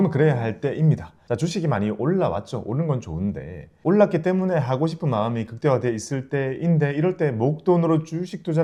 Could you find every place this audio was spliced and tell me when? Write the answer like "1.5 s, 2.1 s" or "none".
none